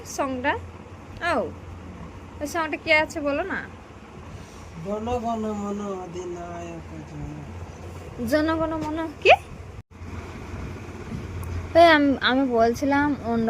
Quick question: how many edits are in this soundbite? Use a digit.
1